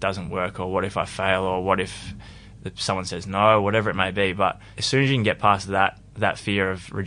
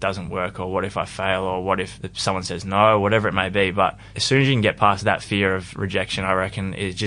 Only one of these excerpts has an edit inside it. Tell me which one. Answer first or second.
second